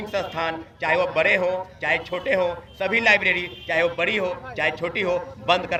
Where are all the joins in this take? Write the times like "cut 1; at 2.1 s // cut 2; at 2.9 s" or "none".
none